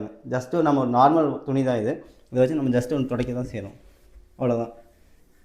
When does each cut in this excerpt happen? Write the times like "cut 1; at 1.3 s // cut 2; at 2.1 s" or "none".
none